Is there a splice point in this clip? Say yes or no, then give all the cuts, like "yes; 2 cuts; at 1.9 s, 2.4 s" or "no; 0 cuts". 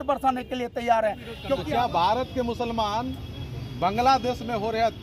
yes; 1 cut; at 1.3 s